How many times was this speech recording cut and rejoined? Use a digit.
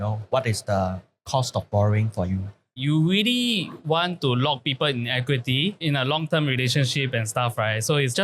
1